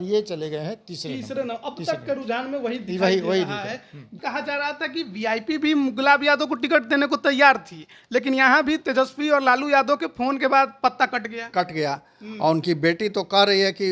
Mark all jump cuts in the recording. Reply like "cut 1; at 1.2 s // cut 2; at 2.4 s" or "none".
cut 1; at 4.1 s